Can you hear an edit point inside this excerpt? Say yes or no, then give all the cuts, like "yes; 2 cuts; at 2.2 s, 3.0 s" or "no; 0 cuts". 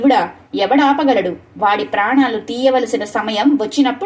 no; 0 cuts